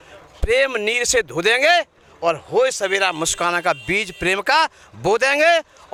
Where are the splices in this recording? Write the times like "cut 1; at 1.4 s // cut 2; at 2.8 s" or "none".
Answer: none